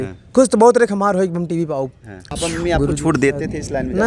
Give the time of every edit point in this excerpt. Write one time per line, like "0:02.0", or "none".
0:02.1